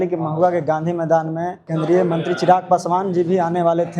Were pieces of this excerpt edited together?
yes; 1 cut; at 1.6 s

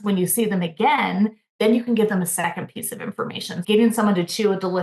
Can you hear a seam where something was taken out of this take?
yes; 1 cut; at 3.6 s

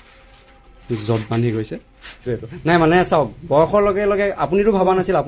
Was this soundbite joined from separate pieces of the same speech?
yes; 1 cut; at 2.2 s

